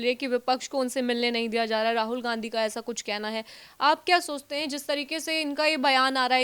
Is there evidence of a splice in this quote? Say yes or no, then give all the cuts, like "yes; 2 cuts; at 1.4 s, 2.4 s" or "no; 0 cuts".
no; 0 cuts